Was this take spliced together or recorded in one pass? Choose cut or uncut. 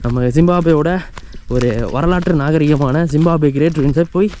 uncut